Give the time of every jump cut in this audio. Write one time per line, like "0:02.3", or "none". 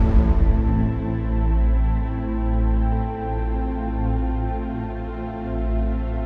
none